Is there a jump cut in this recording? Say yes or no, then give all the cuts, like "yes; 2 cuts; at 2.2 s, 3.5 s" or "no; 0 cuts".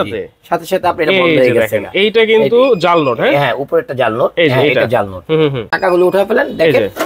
yes; 1 cut; at 5.7 s